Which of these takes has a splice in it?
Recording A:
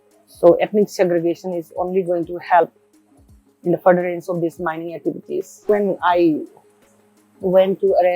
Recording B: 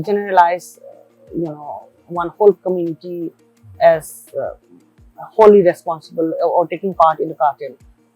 A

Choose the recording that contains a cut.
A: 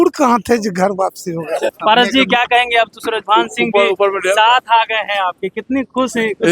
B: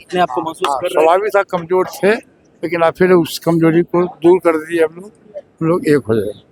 A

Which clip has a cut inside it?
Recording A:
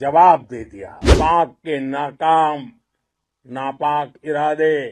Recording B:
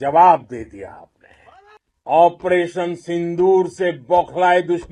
A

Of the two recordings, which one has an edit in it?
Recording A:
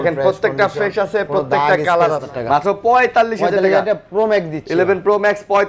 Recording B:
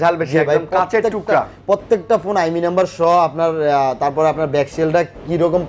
A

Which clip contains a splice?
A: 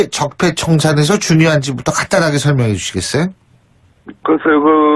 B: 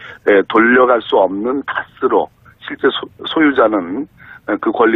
A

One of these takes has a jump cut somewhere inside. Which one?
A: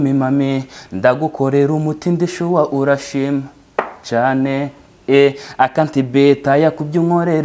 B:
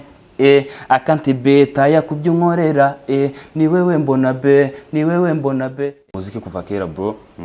B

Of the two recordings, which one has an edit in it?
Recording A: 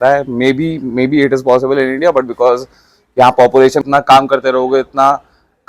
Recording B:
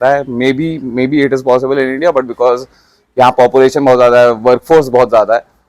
A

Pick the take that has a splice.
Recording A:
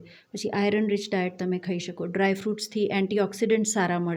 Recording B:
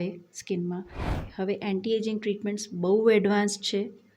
B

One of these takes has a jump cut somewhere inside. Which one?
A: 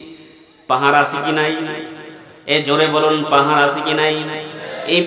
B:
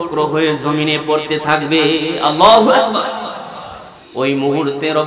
B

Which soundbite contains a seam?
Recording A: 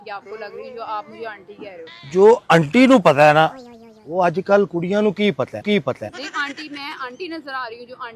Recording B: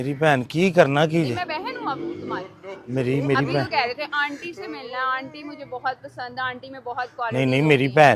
A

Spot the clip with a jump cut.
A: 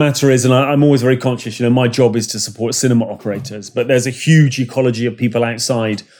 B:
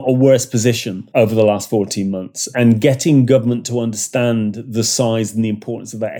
B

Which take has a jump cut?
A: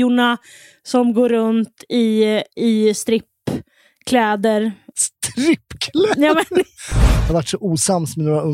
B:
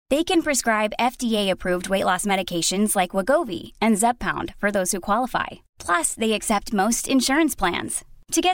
A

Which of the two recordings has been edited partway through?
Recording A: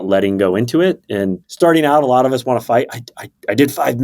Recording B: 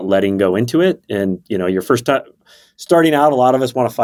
A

